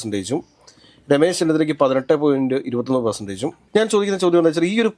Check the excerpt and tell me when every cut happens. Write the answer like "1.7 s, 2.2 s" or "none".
3.5 s